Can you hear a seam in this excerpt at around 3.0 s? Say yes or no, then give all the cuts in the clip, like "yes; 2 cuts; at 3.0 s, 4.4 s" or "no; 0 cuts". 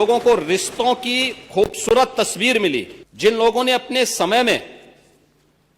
yes; 1 cut; at 3.0 s